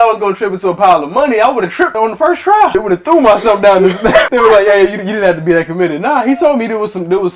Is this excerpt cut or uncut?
cut